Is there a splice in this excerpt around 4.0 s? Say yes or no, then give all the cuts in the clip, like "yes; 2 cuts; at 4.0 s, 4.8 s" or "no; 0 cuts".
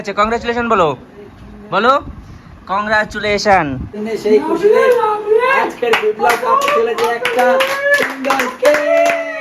yes; 1 cut; at 4.0 s